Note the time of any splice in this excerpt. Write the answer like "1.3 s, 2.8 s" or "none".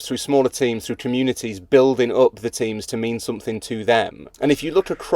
4.2 s